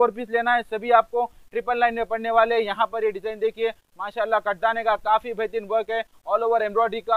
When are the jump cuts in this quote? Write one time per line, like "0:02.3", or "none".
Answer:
none